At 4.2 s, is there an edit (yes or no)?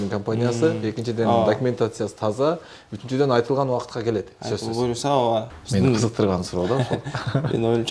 no